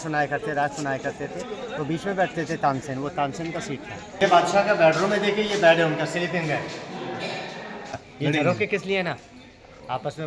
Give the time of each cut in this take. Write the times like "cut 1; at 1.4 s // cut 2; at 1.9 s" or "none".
cut 1; at 4.2 s // cut 2; at 8.0 s